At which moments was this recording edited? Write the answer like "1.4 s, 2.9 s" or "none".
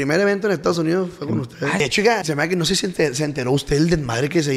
2.0 s